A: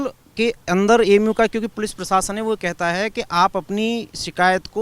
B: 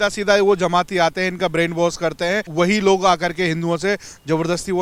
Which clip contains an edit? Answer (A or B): A